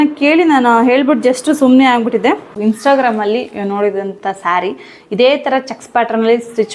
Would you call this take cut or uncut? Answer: cut